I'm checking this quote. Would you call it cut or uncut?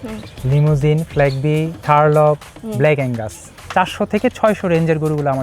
cut